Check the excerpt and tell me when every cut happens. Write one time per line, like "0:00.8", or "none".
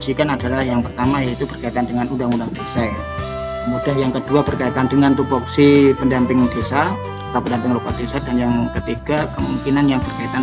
none